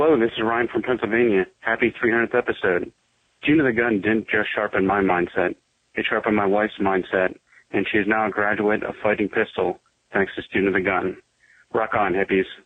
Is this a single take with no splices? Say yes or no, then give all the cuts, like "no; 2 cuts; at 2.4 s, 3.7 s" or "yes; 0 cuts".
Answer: yes; 0 cuts